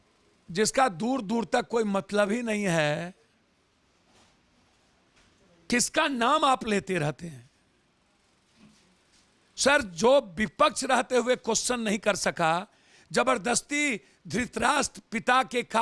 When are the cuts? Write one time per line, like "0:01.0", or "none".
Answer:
none